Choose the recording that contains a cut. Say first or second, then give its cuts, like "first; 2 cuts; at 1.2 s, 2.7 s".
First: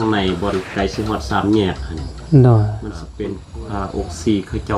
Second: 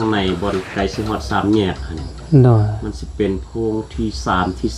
first; 1 cut; at 3.2 s